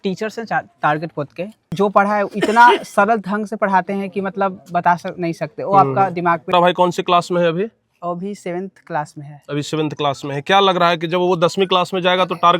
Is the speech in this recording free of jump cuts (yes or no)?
no